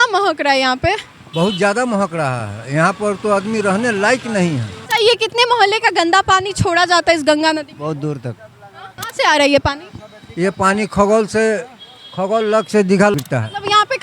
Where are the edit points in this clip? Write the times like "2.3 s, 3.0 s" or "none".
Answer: 4.7 s, 9.0 s, 13.1 s